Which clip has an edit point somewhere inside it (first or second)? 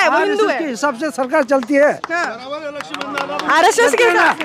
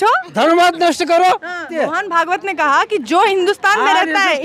second